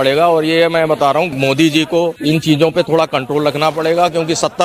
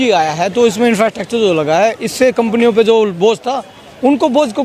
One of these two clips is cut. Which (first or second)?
first